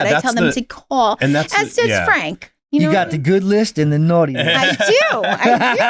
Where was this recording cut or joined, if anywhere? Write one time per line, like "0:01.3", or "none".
none